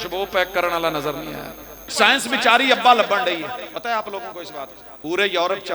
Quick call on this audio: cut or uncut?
cut